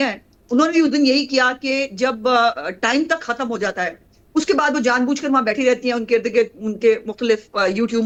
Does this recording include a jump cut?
no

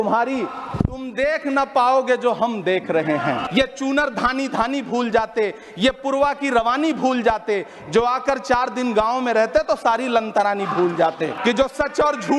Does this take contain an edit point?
yes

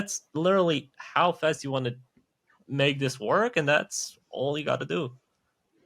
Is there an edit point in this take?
no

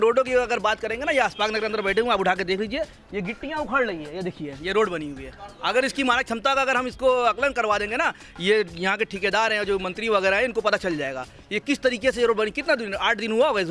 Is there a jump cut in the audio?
no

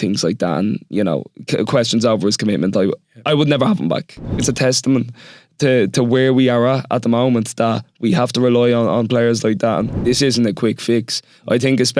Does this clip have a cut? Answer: yes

